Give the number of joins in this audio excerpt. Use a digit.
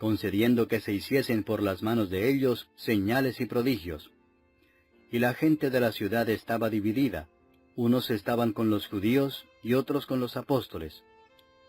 1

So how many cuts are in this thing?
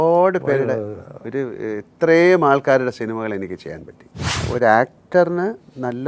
1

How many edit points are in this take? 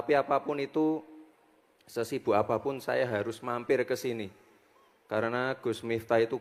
0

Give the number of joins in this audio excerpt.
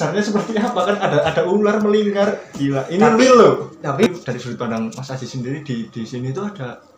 1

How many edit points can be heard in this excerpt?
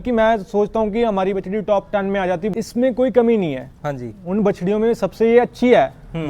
1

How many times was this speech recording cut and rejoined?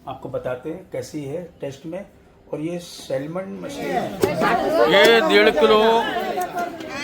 1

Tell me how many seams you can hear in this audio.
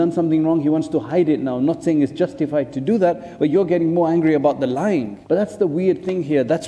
1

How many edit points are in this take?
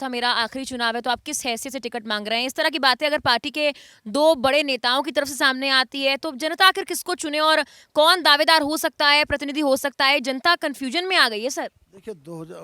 0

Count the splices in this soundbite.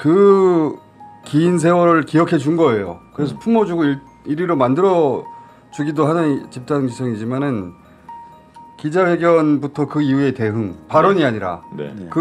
0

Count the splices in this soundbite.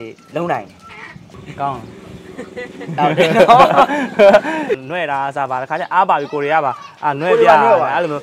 2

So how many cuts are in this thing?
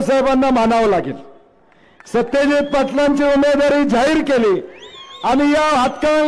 0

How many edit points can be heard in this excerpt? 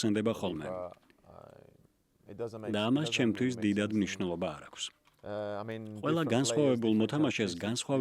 0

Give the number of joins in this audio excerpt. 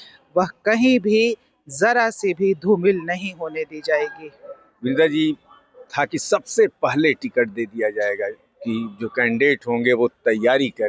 0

